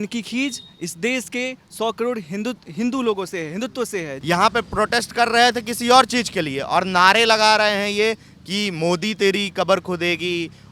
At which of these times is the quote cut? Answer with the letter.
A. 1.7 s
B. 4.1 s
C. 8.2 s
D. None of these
B